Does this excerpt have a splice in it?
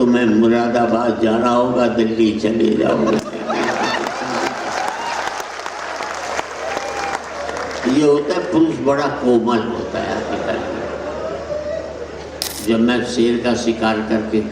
yes; 1 cut; at 12.5 s

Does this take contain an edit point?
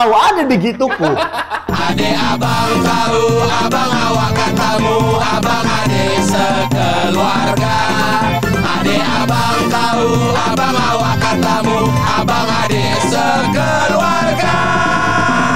yes; 1 cut; at 1.6 s

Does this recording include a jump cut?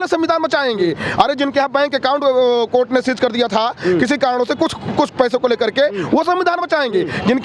no; 0 cuts

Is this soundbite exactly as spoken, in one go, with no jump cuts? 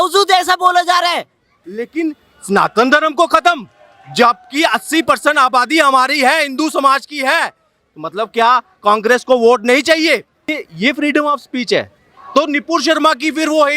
no; 2 cuts; at 1.6 s, 10.5 s

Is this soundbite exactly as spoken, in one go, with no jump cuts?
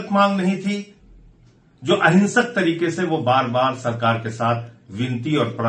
yes; 0 cuts

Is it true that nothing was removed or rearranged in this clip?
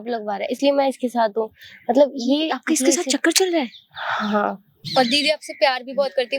no; 1 cut; at 4.7 s

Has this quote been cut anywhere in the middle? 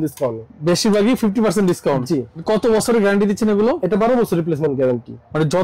yes; 1 cut; at 2.4 s

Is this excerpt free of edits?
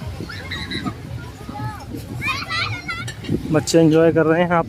no; 1 cut; at 3.0 s

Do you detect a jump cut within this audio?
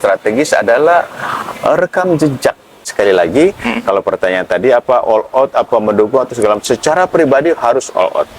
yes; 1 cut; at 2.9 s

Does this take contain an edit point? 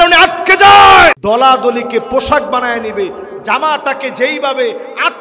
yes; 1 cut; at 1.2 s

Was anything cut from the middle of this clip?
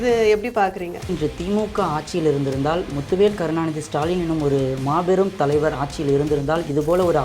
yes; 1 cut; at 1.1 s

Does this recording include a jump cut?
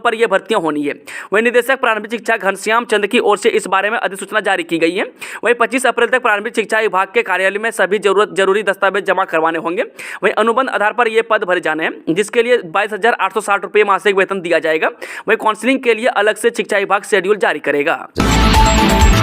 yes; 1 cut; at 18.1 s

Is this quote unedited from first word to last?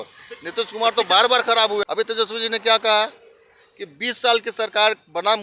no; 1 cut; at 1.8 s

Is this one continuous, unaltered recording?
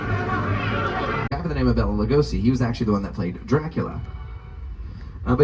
no; 1 cut; at 1.3 s

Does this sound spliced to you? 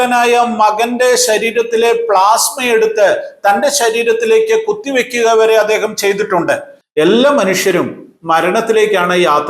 yes; 1 cut; at 6.8 s

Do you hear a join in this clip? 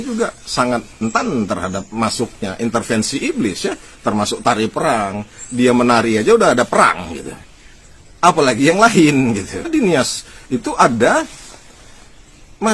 yes; 2 cuts; at 1.0 s, 9.6 s

